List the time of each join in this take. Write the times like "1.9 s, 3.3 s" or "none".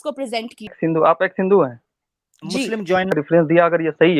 0.8 s, 3.1 s